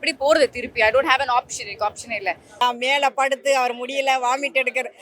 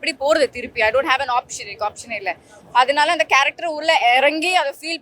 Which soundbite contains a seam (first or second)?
first